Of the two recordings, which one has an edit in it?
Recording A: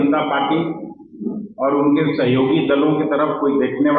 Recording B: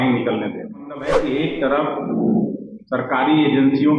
B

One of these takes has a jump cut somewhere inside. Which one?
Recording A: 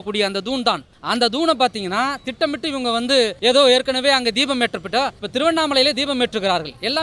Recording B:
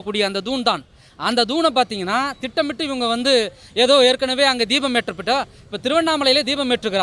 A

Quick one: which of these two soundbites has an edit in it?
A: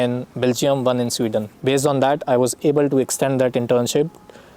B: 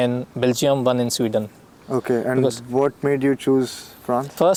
A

